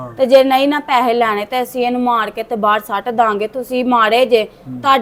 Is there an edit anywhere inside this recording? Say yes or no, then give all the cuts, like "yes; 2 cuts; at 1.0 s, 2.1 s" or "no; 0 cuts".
no; 0 cuts